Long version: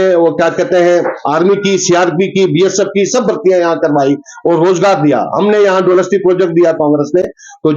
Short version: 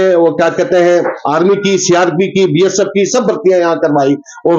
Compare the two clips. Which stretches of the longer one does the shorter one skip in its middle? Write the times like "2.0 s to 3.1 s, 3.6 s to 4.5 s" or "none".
none